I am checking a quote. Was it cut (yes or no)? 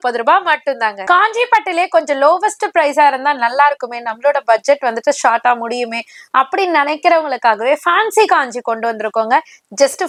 no